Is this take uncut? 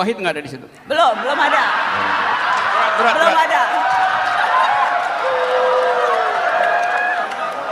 yes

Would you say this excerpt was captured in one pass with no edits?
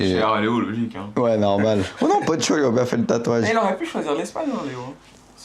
no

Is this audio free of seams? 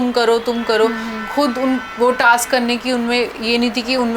yes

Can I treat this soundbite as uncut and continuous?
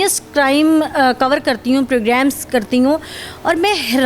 yes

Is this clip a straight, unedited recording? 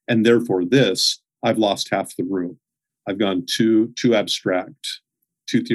yes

